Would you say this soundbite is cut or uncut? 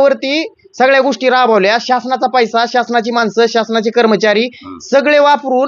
uncut